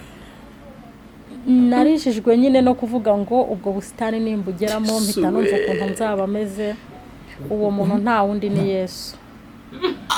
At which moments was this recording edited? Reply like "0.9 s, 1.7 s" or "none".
none